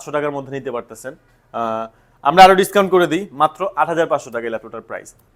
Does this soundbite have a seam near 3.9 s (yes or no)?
no